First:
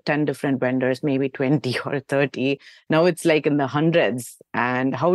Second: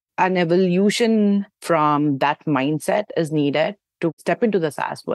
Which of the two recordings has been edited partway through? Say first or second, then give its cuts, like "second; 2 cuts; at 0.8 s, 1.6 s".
second; 2 cuts; at 1.5 s, 4.2 s